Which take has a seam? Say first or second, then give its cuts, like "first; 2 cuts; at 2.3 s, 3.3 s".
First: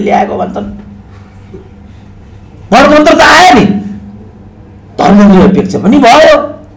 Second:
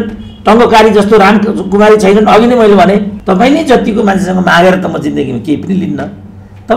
second; 1 cut; at 3.1 s